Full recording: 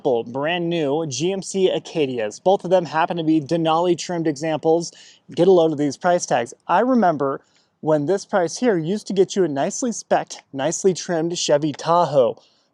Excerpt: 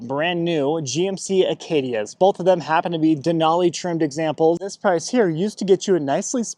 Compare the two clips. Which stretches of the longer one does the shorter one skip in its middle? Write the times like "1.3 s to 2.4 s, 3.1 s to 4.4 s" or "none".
5.0 s to 8.2 s